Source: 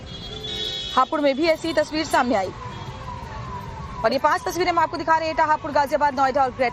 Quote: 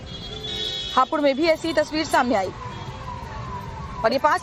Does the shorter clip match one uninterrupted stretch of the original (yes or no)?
yes